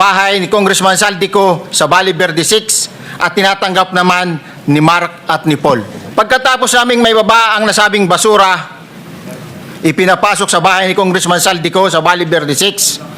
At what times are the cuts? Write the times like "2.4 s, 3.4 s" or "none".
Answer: 6.0 s